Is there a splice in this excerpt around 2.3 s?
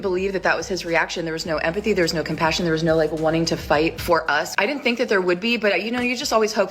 yes; 1 cut; at 2.3 s

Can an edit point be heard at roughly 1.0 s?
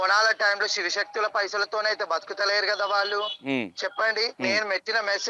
no; 2 cuts; at 3.4 s, 4.3 s

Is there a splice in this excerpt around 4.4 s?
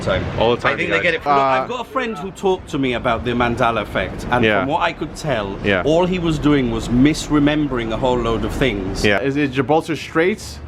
no; 2 cuts; at 1.3 s, 9.2 s

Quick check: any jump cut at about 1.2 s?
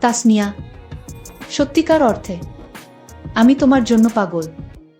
yes; 1 cut; at 1.2 s

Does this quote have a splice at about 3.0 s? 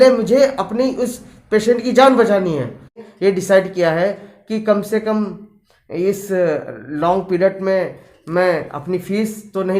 yes; 1 cut; at 3.0 s

